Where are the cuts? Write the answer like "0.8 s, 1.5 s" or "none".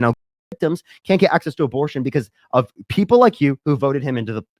none